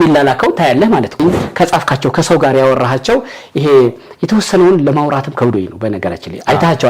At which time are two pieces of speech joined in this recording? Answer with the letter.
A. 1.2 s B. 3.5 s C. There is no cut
A